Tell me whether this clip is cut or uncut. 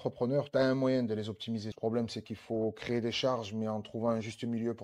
cut